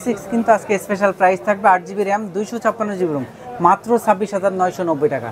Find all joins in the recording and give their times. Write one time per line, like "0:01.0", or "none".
none